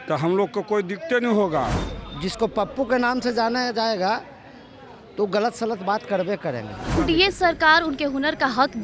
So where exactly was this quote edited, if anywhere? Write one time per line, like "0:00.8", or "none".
0:01.9
0:07.0